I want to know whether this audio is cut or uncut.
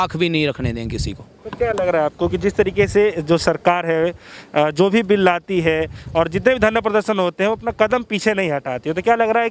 uncut